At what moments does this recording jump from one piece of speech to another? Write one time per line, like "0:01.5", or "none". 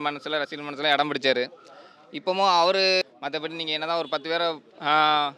0:03.0